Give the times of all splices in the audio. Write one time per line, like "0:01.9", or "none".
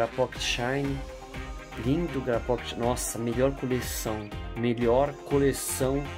none